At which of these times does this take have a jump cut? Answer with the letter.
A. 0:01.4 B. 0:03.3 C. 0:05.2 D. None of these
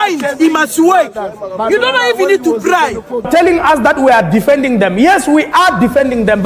B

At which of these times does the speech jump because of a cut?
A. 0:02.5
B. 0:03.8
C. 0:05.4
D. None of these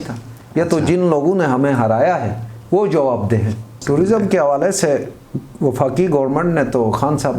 B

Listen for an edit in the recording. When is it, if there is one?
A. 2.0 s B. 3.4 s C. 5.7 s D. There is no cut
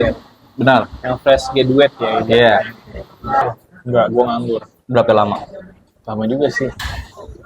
B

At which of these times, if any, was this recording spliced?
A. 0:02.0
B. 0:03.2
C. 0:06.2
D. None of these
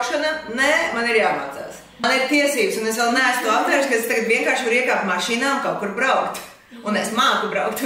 A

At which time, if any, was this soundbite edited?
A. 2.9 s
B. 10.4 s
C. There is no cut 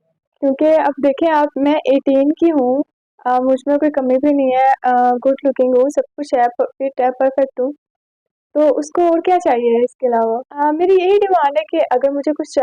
B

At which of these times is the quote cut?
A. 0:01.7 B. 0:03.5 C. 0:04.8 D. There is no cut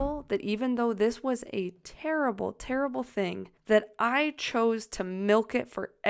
B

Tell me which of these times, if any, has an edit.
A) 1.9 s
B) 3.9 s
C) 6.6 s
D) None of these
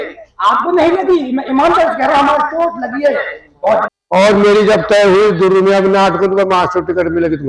B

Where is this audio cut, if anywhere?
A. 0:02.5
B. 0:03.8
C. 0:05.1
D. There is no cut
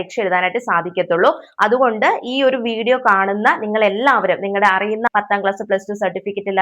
C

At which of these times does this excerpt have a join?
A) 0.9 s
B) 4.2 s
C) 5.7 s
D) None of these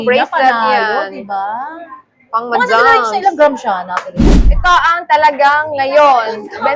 B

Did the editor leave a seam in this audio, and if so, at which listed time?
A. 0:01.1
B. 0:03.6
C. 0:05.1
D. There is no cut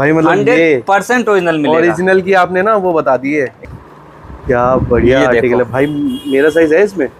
B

